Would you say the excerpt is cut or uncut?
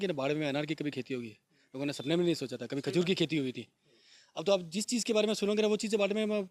uncut